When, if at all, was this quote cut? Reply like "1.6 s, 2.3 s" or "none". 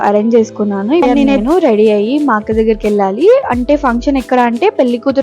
1.0 s

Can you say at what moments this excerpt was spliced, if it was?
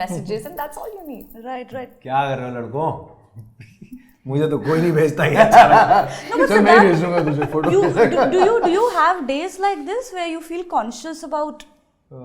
none

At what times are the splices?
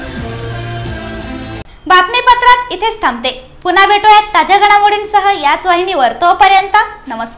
none

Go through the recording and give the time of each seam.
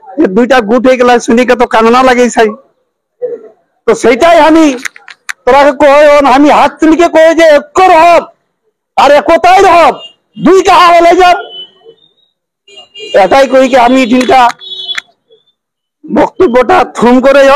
none

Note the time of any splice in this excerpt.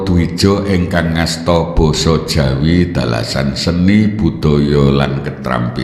none

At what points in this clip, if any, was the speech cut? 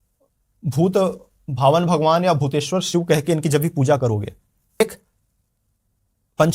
4.8 s

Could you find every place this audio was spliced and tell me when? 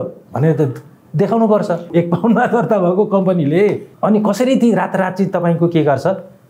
1.9 s, 3.9 s

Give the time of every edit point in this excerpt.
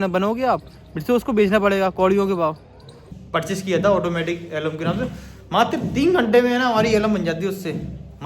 3.0 s

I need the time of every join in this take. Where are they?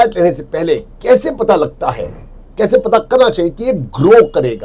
none

